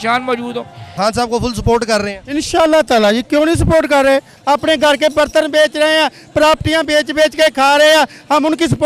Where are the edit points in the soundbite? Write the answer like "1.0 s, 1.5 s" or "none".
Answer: 0.9 s, 4.3 s